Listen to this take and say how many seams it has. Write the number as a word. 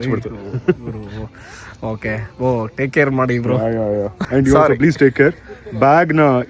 one